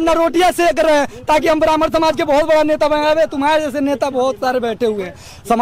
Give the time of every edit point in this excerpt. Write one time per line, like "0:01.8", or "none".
none